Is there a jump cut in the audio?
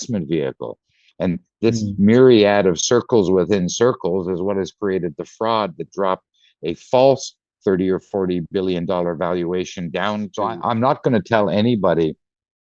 yes; 1 cut; at 10.3 s

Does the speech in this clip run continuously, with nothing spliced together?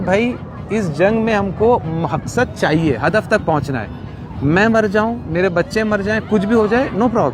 yes; 0 cuts

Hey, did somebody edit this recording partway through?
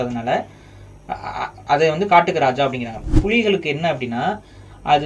yes; 2 cuts; at 1.6 s, 3.1 s

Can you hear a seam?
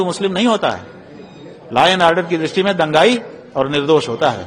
no; 0 cuts

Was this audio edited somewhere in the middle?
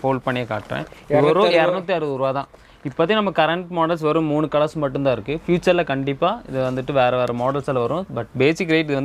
no; 0 cuts

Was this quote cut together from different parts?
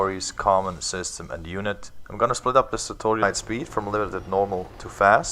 no; 0 cuts

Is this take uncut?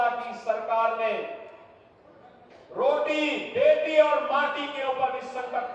yes; 0 cuts

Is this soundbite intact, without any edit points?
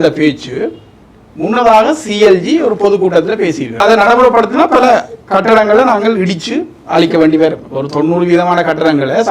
no; 1 cut; at 3.8 s

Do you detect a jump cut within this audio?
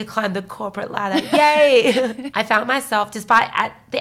yes; 1 cut; at 2.2 s

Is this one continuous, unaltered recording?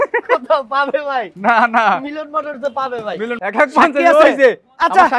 no; 1 cut; at 3.3 s

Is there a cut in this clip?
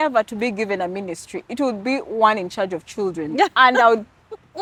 no; 0 cuts

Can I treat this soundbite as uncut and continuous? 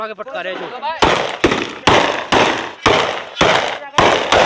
yes; 0 cuts

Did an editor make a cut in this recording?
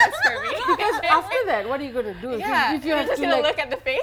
no; 0 cuts

